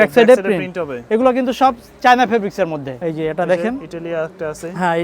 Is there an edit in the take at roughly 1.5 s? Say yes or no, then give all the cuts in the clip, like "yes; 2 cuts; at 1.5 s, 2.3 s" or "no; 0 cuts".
no; 1 cut; at 2.9 s